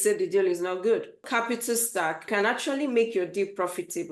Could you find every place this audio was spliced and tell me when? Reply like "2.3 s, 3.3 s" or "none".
1.2 s, 2.3 s